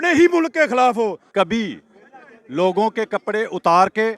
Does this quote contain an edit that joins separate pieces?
yes; 1 cut; at 1.2 s

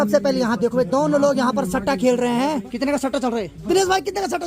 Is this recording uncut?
no; 2 cuts; at 2.7 s, 3.6 s

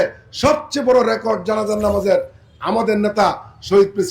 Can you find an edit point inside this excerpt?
no; 0 cuts

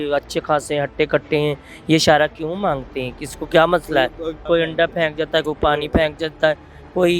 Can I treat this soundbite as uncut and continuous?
no; 1 cut; at 4.4 s

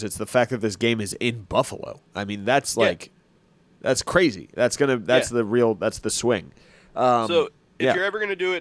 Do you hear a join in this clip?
no; 0 cuts

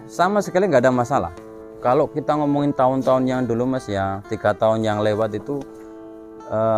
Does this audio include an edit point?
yes; 1 cut; at 1.6 s

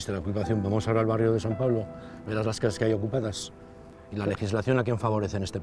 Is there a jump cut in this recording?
no; 0 cuts

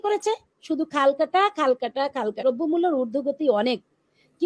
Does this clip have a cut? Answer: yes; 1 cut; at 2.4 s

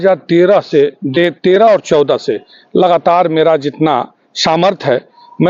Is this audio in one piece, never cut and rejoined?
yes; 0 cuts

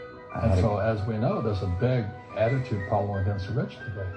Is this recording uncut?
no; 1 cut; at 1.7 s

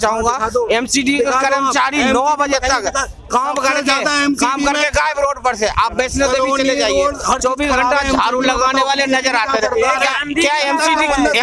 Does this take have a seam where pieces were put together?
no; 0 cuts

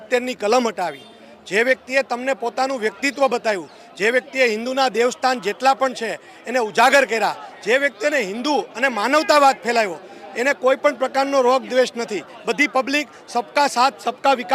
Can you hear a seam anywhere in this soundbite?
no; 0 cuts

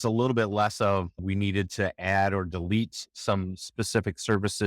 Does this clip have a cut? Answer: yes; 1 cut; at 1.2 s

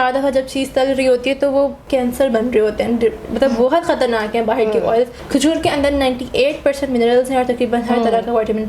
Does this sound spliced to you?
yes; 2 cuts; at 1.8 s, 5.2 s

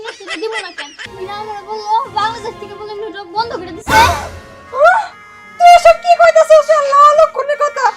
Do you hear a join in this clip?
yes; 1 cut; at 1.0 s

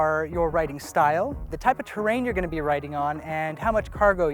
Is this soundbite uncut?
no; 1 cut; at 1.5 s

